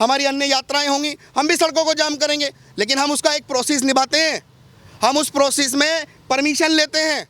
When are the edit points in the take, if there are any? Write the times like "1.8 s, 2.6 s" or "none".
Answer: none